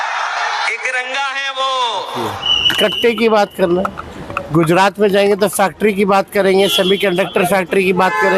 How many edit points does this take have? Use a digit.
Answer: 1